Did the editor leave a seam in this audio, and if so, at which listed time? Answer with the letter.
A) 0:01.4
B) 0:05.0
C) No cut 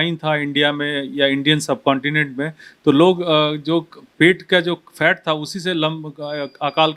C